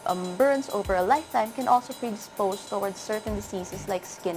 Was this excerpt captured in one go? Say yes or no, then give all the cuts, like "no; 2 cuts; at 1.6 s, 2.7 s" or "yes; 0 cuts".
no; 1 cut; at 2.3 s